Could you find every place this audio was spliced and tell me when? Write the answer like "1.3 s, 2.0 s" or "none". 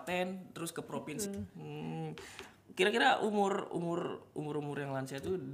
1.1 s